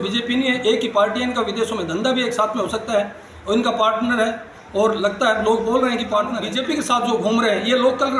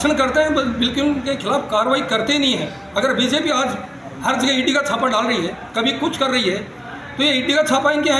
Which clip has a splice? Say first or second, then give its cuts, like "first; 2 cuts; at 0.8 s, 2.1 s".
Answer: first; 1 cut; at 6.5 s